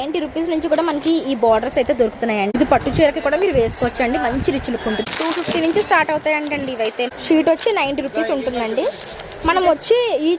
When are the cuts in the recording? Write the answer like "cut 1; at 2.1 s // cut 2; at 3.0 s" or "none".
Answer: cut 1; at 2.5 s // cut 2; at 5.1 s // cut 3; at 7.2 s